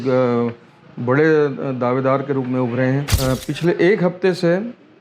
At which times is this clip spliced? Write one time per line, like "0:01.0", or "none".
0:03.1